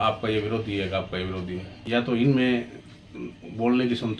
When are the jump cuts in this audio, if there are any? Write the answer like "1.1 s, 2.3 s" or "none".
1.8 s